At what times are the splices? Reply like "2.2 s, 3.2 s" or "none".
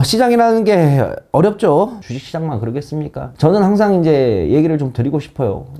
2.0 s, 3.3 s

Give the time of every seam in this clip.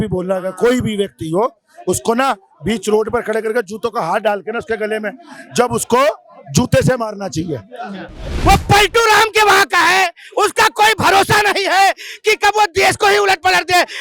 8.2 s

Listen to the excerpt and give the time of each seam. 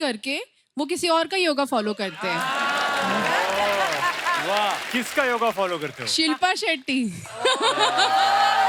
none

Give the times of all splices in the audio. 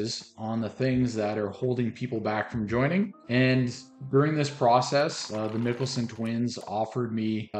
none

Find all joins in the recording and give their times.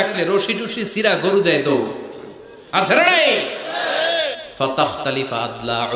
4.4 s

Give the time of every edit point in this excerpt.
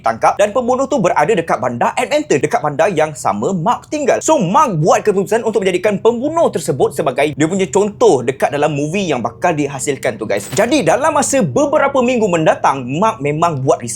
7.3 s, 10.5 s

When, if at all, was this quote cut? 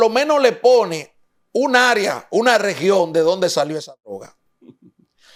none

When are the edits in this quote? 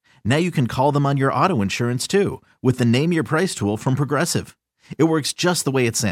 none

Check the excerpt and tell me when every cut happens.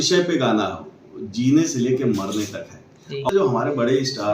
3.3 s

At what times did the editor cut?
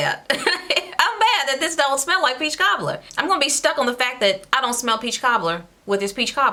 none

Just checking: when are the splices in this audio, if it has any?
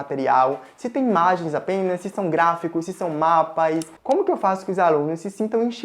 3.9 s

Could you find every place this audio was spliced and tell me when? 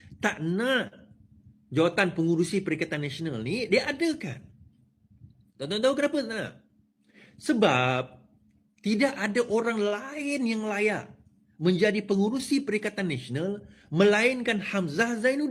none

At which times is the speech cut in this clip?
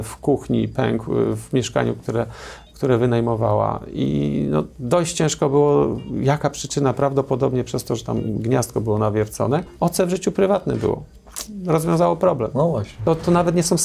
9.7 s, 13.0 s

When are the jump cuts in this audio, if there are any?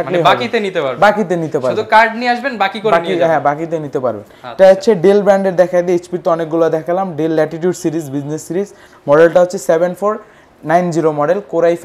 none

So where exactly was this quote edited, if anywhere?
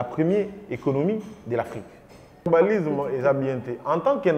2.5 s

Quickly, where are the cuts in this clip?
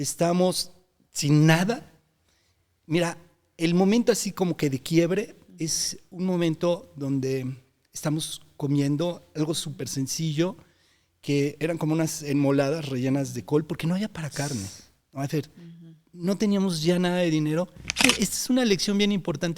18.0 s

